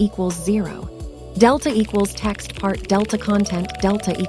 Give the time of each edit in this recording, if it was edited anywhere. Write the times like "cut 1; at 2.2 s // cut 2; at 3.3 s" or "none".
none